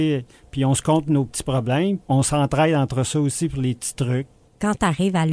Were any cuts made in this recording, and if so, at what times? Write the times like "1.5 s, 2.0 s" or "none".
2.0 s, 4.4 s